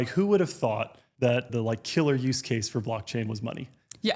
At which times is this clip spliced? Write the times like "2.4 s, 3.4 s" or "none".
1.3 s